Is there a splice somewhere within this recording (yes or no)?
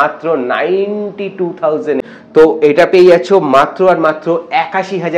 yes